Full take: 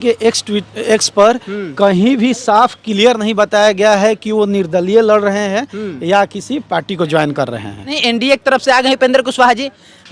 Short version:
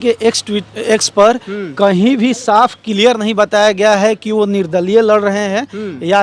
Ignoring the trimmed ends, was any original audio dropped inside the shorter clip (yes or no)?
no